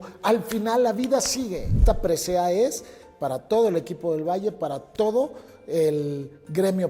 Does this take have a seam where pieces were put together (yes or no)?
yes